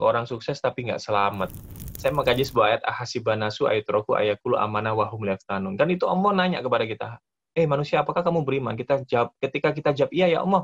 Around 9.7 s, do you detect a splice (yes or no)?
no